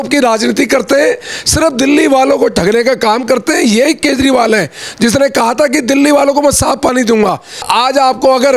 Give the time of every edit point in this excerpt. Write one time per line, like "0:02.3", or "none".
0:07.6